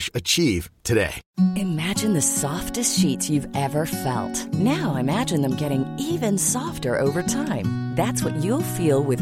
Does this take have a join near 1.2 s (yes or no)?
yes